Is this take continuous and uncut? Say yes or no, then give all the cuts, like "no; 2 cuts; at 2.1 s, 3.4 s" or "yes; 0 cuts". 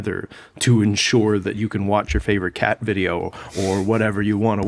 yes; 0 cuts